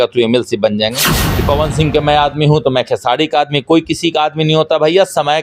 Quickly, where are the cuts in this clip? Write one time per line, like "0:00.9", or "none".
0:01.2